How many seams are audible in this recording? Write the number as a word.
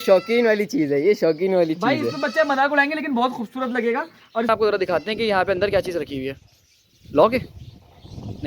one